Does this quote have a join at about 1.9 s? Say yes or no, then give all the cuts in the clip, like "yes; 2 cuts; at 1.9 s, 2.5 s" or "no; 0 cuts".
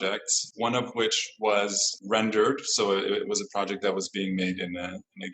yes; 1 cut; at 1.9 s